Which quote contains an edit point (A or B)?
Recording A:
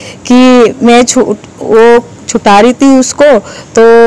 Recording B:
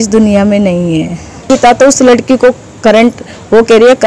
B